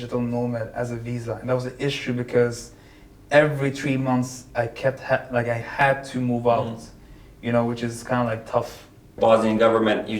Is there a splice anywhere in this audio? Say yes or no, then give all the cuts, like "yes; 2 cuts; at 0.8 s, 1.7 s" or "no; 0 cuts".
yes; 1 cut; at 9.2 s